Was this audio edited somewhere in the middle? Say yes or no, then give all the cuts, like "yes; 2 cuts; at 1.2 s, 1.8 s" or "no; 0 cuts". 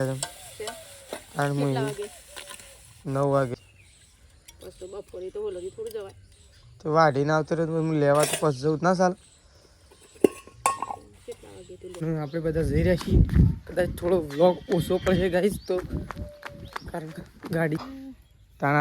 yes; 3 cuts; at 3.5 s, 12.0 s, 17.8 s